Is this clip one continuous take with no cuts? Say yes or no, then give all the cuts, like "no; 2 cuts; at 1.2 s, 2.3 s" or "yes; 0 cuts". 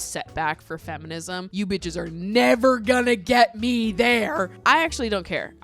no; 2 cuts; at 1.5 s, 4.5 s